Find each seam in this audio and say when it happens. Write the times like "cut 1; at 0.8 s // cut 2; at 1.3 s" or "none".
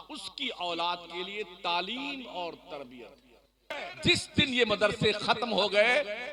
cut 1; at 3.8 s